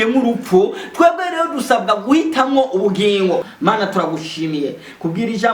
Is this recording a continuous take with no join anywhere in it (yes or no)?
no